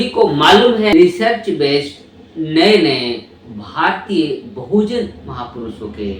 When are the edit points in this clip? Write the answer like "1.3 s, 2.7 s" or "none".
0.9 s

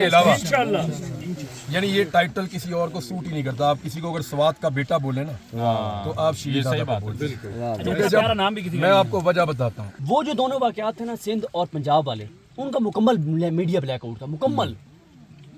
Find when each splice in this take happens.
9.9 s

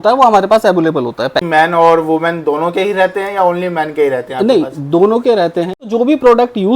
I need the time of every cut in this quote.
1.5 s, 5.9 s

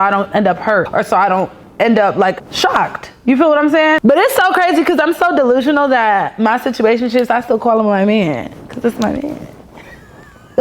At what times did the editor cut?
4.0 s

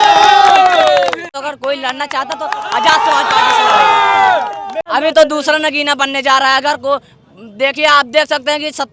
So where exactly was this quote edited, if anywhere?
1.3 s, 4.8 s

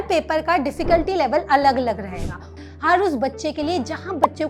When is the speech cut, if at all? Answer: 2.6 s

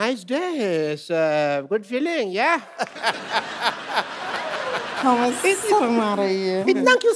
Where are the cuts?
4.3 s

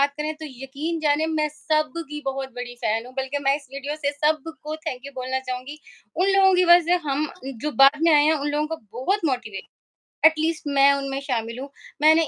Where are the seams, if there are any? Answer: none

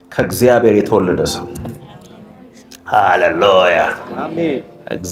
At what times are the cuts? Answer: none

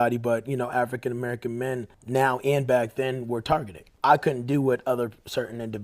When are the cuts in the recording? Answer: 1.9 s, 3.8 s

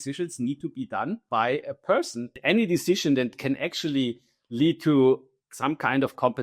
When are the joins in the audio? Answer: 1.2 s, 2.4 s

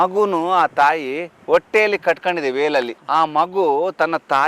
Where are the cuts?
3.0 s

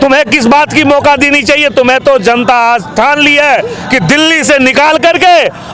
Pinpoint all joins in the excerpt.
none

